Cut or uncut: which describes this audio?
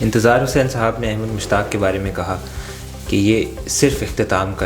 uncut